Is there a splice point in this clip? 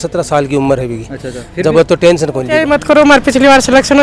yes; 1 cut; at 2.6 s

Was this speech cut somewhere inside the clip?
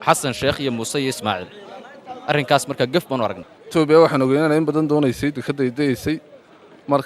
no; 0 cuts

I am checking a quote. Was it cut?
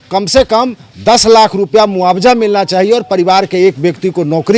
no; 0 cuts

